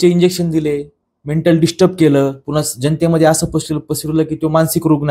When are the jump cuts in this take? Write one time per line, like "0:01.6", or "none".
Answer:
none